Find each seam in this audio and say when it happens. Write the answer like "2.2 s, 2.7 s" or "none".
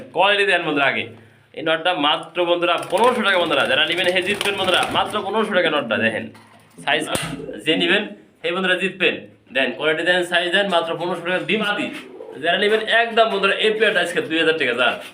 7.1 s, 11.7 s